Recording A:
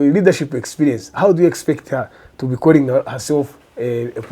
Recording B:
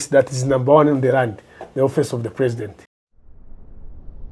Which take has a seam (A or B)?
B